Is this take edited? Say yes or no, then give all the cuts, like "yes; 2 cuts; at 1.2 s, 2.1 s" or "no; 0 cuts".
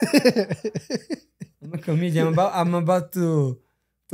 no; 0 cuts